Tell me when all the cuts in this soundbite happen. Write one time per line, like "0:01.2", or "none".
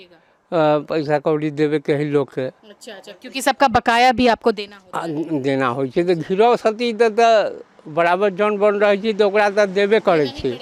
none